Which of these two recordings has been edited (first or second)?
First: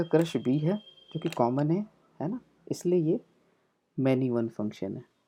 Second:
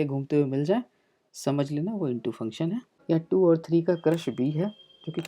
second